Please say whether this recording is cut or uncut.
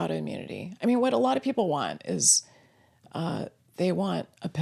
uncut